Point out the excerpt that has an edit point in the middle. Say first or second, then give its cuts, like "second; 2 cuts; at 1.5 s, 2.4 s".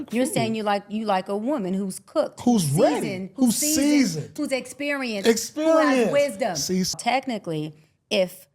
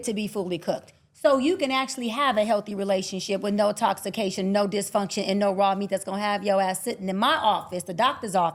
first; 1 cut; at 6.9 s